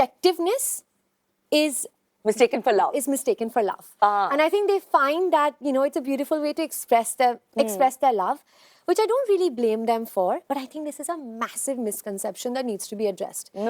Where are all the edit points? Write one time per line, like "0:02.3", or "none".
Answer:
none